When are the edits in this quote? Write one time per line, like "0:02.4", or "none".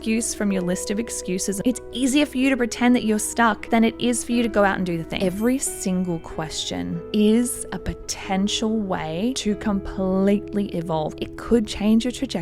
0:01.6
0:05.1
0:11.2